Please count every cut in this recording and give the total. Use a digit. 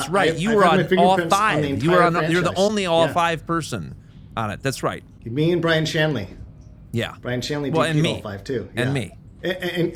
0